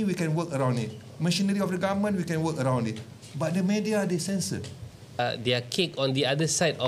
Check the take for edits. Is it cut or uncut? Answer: cut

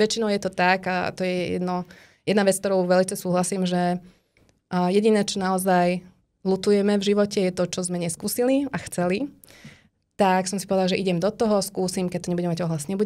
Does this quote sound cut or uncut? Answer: uncut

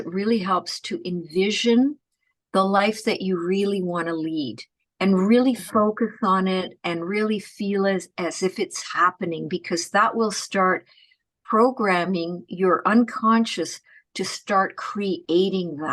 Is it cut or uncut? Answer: uncut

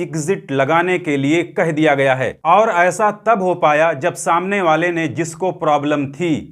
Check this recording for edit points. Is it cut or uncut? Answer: cut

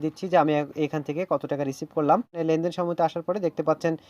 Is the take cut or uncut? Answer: cut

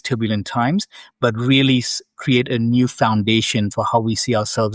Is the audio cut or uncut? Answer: uncut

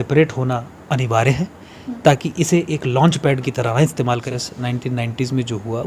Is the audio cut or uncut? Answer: cut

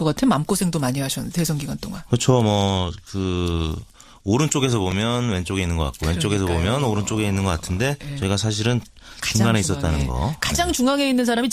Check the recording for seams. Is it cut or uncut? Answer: cut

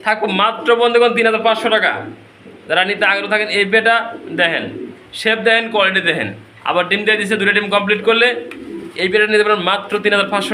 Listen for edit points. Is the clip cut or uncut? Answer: uncut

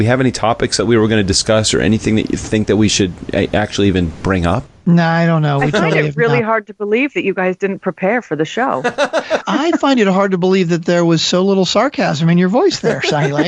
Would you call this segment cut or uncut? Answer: cut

